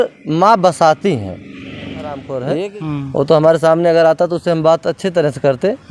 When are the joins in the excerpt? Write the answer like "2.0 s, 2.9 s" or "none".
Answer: 2.3 s

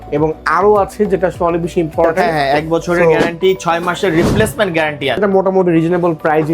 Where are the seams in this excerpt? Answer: 2.2 s, 5.2 s

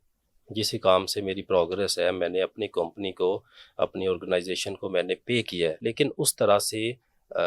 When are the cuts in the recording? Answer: 5.8 s

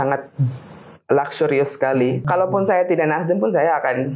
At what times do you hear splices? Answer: 2.2 s

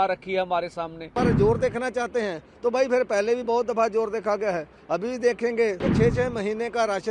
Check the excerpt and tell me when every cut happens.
1.1 s, 5.9 s

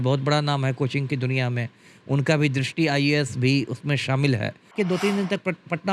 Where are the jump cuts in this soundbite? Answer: 4.7 s

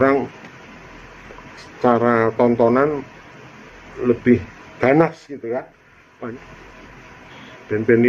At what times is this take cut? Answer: 6.3 s

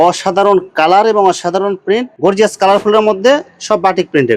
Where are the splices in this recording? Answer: none

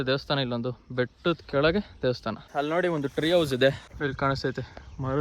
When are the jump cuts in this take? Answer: 2.4 s, 3.9 s

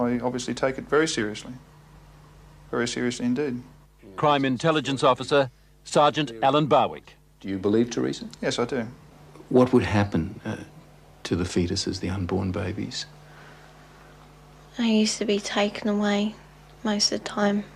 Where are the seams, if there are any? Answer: 5.5 s

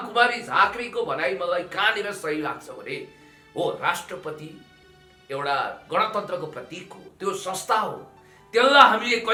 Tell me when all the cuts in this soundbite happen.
none

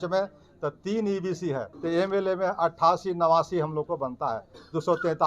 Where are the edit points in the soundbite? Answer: 1.7 s

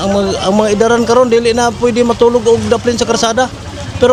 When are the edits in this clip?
none

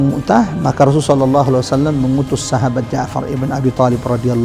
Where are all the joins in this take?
none

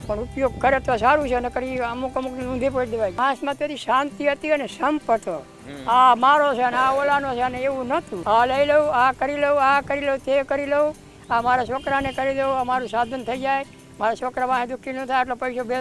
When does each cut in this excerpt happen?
3.2 s, 8.1 s

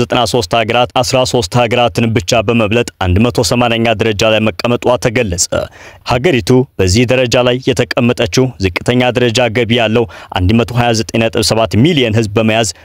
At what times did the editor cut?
none

